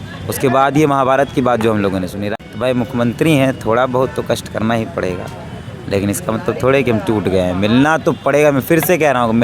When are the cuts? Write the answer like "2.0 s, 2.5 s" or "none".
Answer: 2.2 s